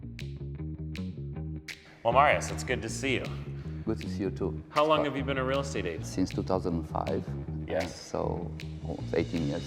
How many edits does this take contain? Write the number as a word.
zero